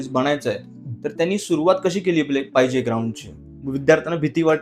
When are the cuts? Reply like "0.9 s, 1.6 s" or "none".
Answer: 3.7 s